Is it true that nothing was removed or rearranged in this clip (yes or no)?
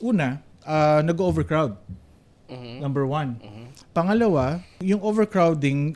no